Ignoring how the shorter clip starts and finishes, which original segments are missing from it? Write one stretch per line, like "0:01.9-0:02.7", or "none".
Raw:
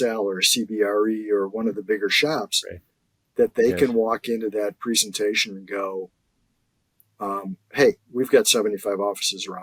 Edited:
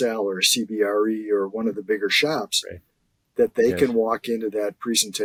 none